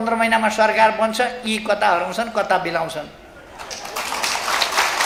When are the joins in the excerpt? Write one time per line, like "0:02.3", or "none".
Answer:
none